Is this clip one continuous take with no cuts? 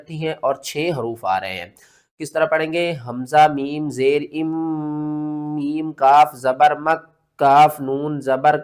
yes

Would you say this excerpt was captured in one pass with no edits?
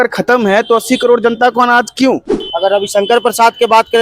no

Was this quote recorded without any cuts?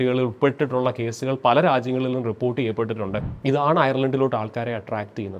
no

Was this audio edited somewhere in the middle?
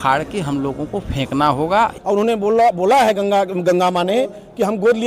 yes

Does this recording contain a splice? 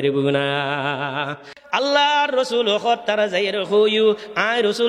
yes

